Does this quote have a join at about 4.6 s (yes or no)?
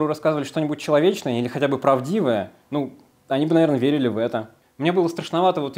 yes